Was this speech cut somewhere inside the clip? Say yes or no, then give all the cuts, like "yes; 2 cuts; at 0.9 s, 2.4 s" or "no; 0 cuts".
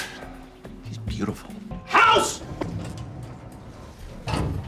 no; 0 cuts